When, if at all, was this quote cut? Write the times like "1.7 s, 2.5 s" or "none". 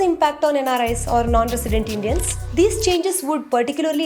2.3 s